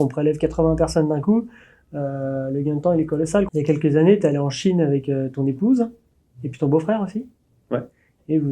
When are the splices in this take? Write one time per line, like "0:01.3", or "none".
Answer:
0:03.5